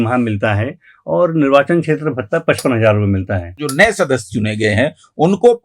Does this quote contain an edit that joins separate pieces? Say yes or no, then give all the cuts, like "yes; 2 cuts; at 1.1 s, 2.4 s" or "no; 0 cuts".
yes; 1 cut; at 3.6 s